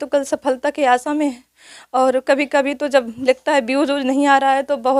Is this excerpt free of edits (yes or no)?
yes